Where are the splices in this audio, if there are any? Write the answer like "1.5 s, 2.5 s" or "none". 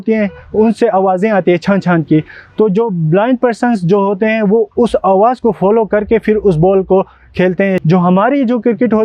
7.8 s

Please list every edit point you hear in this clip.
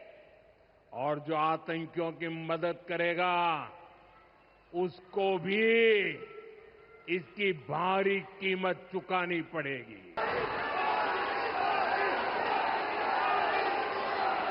10.2 s

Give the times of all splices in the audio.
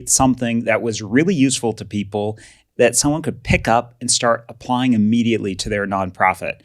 2.6 s

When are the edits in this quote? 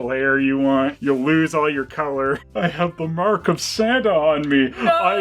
2.5 s

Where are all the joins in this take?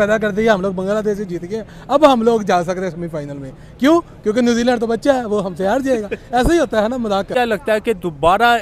7.3 s

